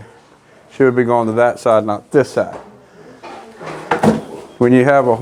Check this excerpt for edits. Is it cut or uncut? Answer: uncut